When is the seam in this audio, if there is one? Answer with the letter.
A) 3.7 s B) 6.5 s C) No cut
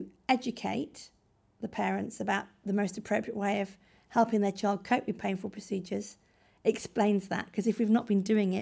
C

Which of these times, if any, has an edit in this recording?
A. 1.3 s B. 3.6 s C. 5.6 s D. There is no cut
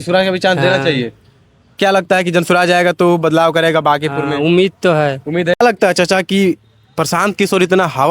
C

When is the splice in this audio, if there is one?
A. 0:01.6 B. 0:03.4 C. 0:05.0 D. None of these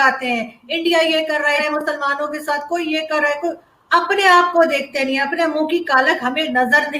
A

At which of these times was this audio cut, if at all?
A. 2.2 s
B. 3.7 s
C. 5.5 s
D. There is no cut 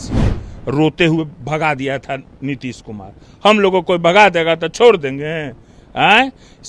D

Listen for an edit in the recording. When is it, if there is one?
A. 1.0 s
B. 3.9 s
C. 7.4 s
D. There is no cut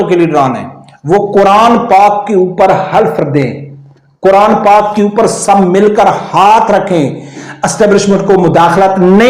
C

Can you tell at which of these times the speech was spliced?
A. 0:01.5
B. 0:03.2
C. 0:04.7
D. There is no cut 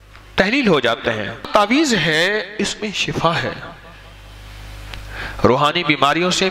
A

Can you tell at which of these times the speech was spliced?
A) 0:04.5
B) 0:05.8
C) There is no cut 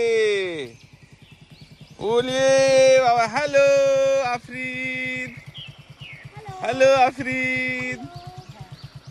C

